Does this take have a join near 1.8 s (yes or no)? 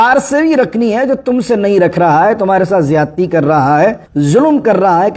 no